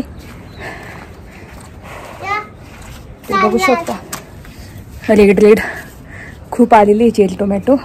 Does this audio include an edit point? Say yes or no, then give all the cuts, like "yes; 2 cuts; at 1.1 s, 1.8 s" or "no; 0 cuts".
no; 0 cuts